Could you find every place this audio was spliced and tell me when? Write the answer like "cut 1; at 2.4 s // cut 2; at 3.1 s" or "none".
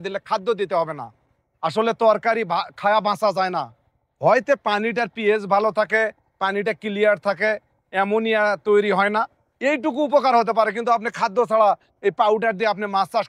none